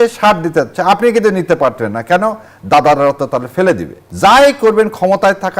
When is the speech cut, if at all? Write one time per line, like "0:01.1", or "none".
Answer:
0:04.0